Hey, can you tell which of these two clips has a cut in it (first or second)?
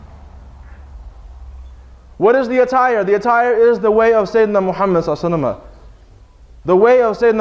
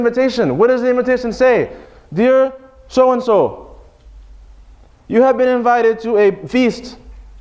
second